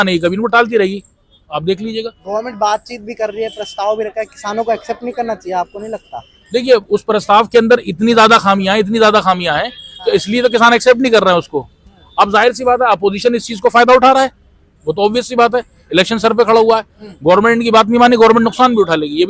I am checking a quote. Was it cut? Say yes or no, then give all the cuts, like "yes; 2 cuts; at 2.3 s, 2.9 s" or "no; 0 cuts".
no; 0 cuts